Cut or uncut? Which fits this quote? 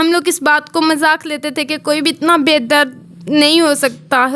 uncut